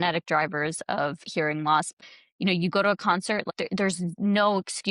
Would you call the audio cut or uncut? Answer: cut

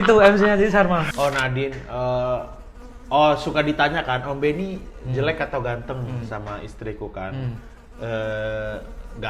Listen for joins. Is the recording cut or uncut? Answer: cut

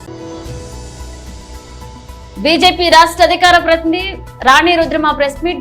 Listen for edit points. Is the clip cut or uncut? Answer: uncut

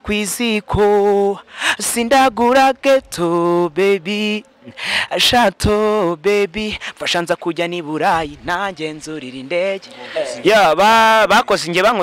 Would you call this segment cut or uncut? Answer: cut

